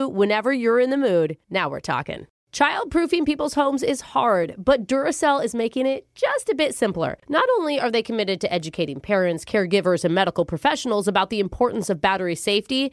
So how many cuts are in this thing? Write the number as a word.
one